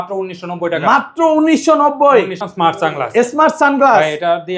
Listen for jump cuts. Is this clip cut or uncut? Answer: cut